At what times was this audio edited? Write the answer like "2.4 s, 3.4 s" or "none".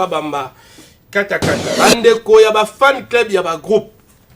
1.7 s